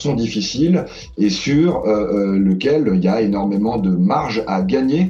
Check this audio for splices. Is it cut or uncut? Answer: uncut